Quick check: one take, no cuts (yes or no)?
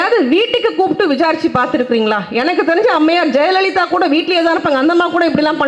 yes